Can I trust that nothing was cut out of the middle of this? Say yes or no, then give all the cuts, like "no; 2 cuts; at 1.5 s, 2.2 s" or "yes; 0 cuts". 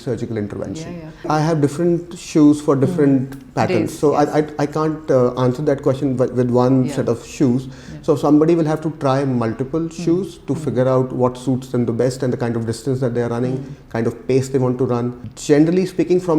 no; 2 cuts; at 1.3 s, 15.3 s